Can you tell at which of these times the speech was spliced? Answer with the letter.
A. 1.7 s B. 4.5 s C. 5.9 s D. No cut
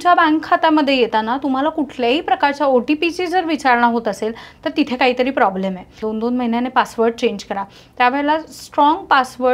C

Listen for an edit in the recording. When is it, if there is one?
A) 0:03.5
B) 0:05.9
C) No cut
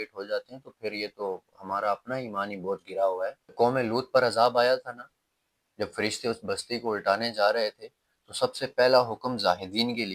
A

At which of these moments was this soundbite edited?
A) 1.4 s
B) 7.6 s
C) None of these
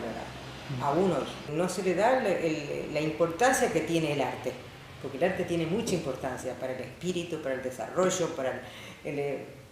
A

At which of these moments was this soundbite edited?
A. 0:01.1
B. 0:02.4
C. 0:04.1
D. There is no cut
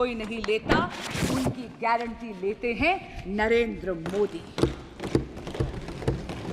D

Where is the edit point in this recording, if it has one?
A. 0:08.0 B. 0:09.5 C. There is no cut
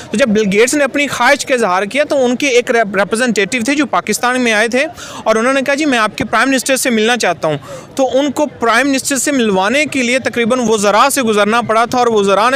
C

